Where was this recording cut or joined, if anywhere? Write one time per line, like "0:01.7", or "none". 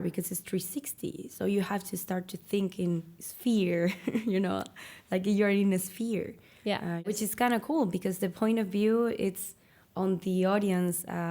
0:07.1